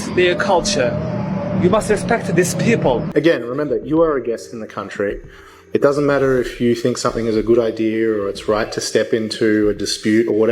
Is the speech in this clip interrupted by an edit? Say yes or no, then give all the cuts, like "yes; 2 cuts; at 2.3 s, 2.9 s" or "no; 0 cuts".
yes; 1 cut; at 3.0 s